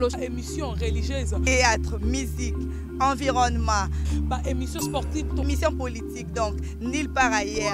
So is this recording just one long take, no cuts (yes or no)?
yes